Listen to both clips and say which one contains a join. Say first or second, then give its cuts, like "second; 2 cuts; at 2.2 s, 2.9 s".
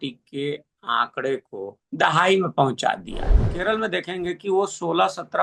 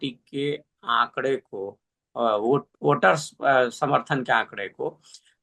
first; 2 cuts; at 1.8 s, 3.5 s